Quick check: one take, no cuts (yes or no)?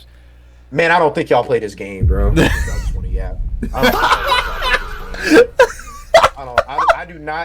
yes